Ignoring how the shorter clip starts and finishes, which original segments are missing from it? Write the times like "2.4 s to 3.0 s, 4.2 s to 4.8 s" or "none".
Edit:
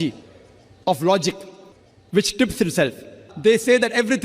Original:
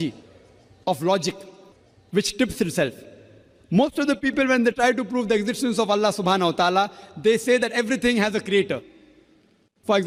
3.2 s to 7.0 s